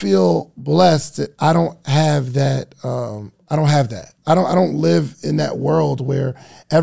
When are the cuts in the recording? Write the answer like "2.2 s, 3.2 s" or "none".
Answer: 4.1 s